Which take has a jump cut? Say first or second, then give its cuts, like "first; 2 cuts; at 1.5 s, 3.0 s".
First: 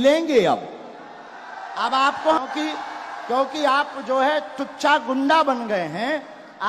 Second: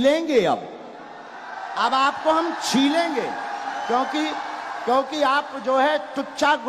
first; 1 cut; at 2.4 s